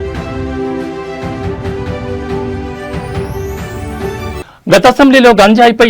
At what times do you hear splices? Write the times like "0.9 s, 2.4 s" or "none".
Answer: 4.1 s